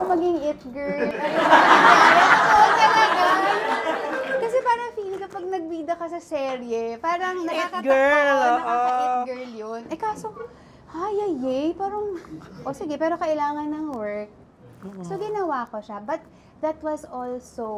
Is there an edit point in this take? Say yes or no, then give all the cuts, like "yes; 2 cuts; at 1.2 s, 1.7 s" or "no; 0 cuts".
no; 0 cuts